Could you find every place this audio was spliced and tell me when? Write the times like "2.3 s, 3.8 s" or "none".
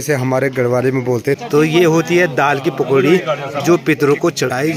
1.4 s